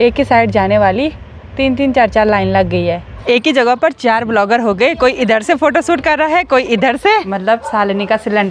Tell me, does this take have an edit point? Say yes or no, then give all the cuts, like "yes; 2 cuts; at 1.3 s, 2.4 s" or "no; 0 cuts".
yes; 2 cuts; at 3.1 s, 7.3 s